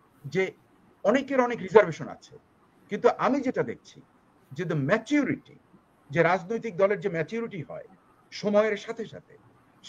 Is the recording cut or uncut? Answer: uncut